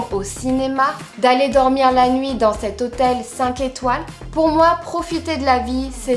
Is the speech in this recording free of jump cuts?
yes; 0 cuts

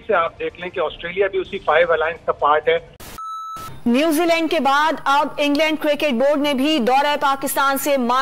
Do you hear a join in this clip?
yes; 1 cut; at 3.0 s

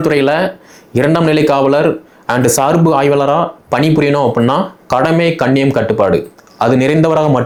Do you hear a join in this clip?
no; 0 cuts

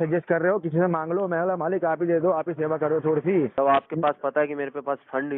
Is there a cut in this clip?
yes; 1 cut; at 3.5 s

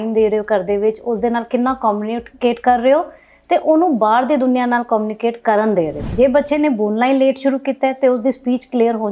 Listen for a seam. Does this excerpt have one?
yes; 1 cut; at 6.0 s

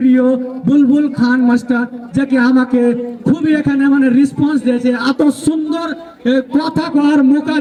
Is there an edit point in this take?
no; 0 cuts

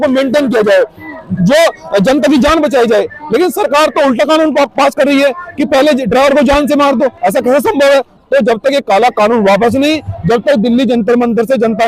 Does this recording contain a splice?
no; 0 cuts

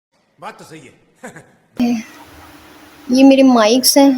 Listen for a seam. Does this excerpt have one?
yes; 1 cut; at 1.8 s

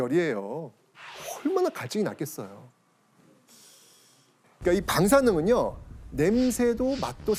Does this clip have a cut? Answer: no; 0 cuts

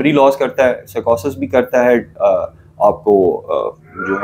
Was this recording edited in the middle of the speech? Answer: no; 0 cuts

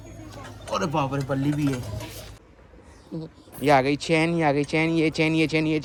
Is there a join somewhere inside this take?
no; 0 cuts

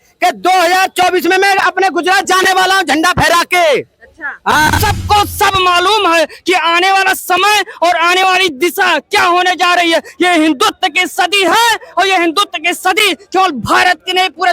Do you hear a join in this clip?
yes; 1 cut; at 4.8 s

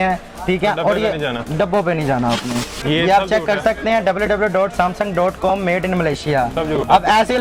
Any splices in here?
yes; 1 cut; at 2.8 s

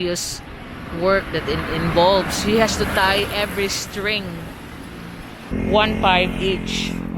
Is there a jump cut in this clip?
yes; 1 cut; at 5.5 s

